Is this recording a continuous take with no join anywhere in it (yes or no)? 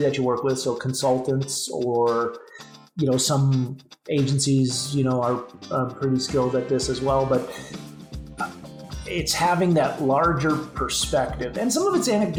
yes